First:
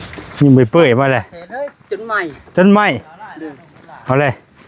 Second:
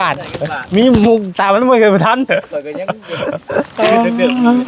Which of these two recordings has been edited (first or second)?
first